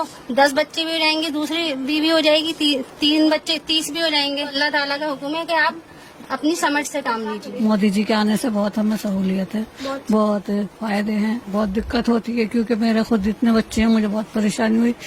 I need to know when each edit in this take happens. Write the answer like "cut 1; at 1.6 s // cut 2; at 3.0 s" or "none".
cut 1; at 4.5 s // cut 2; at 7.5 s // cut 3; at 11.5 s